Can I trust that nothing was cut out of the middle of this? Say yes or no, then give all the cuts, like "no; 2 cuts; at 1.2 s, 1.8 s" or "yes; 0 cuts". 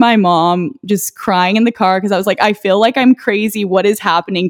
yes; 0 cuts